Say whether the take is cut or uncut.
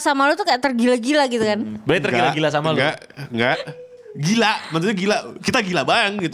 uncut